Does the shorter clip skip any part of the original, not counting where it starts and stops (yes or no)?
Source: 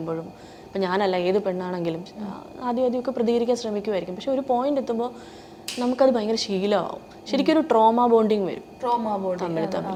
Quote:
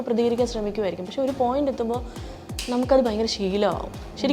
no